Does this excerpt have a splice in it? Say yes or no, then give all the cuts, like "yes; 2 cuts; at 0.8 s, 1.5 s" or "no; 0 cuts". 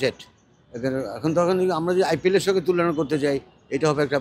no; 0 cuts